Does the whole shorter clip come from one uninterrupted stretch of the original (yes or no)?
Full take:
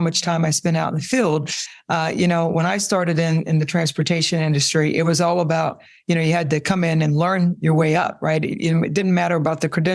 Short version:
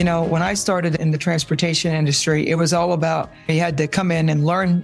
no